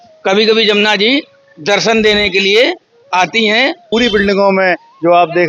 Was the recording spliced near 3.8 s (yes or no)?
yes